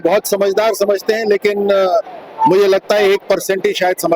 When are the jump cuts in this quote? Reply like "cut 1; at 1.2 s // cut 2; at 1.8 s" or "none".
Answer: none

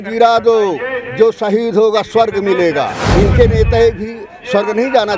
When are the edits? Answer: cut 1; at 3.0 s

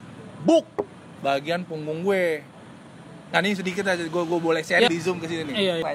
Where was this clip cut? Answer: cut 1; at 4.9 s

